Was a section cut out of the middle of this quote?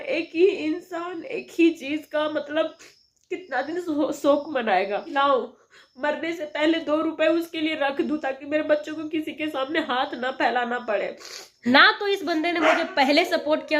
yes; 2 cuts; at 5.1 s, 11.7 s

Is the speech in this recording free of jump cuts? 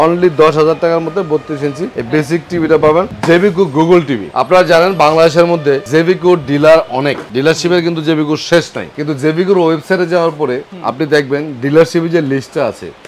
yes; 0 cuts

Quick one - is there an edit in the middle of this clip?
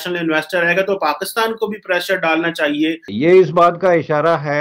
yes; 1 cut; at 3.1 s

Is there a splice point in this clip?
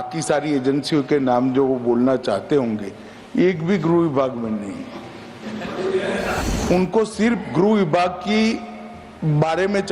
yes; 1 cut; at 6.4 s

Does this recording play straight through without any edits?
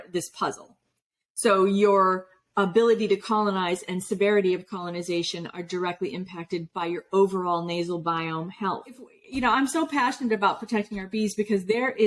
no; 1 cut; at 9.1 s

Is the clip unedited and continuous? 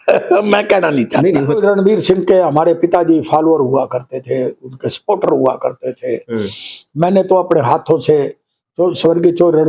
no; 1 cut; at 1.5 s

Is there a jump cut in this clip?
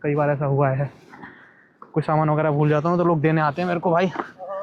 no; 0 cuts

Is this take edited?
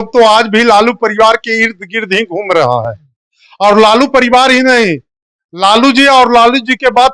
no; 0 cuts

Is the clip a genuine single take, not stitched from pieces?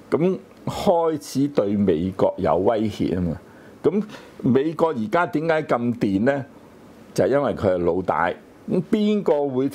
no; 1 cut; at 8.6 s

